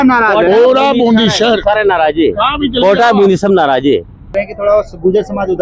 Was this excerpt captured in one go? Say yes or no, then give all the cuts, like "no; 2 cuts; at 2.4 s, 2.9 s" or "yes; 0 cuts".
no; 1 cut; at 4.4 s